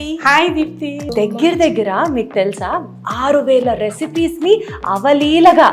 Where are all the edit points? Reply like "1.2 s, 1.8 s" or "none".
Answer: 1.0 s